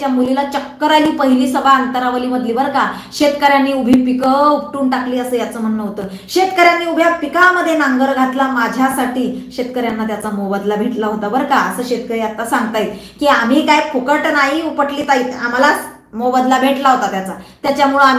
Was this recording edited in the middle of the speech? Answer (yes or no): no